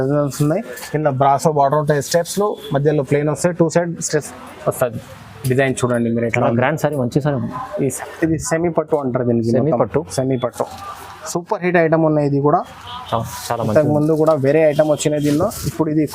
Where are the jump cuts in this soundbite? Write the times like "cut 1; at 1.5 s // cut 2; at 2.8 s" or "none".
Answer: cut 1; at 7.9 s